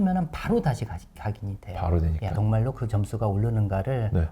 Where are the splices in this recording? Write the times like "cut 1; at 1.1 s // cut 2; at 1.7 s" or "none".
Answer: cut 1; at 2.3 s